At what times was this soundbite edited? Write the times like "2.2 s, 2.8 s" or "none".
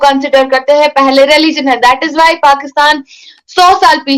none